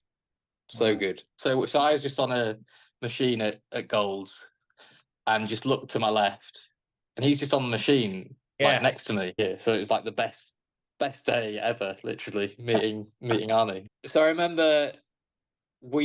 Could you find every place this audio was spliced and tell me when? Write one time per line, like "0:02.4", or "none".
0:01.3
0:09.4
0:13.8